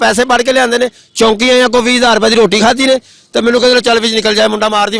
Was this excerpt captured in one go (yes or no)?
yes